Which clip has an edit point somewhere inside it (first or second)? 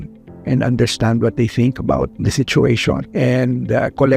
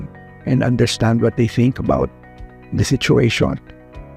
first